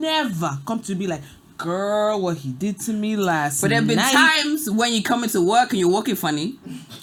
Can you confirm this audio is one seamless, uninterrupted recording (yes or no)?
yes